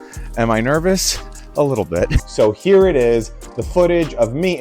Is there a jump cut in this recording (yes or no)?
yes